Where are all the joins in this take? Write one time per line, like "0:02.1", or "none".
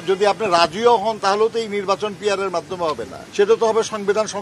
0:03.2